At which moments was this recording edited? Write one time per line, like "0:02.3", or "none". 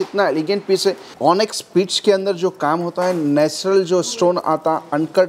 0:01.1